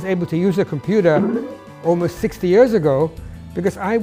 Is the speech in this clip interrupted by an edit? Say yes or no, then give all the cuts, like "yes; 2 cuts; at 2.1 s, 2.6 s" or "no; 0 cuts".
no; 0 cuts